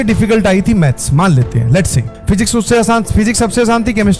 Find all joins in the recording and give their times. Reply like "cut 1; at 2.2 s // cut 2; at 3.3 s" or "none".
none